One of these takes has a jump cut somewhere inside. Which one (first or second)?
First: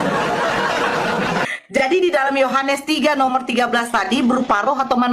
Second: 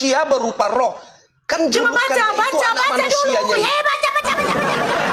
first